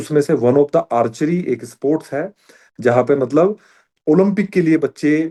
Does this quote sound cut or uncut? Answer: uncut